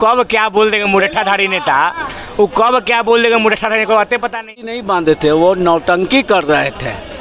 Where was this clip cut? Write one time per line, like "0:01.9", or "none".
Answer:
0:04.8